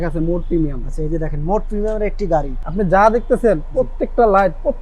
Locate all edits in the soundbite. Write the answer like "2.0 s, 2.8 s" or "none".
2.6 s